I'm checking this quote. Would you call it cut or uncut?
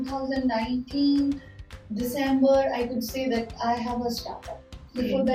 uncut